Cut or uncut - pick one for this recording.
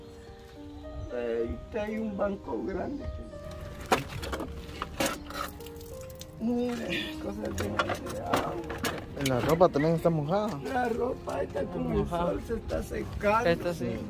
cut